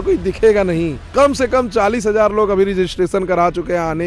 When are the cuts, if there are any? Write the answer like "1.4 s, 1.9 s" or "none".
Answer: 1.0 s